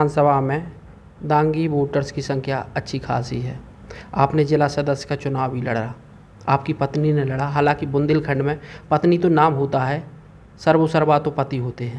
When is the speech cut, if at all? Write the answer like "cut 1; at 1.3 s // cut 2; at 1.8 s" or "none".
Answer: none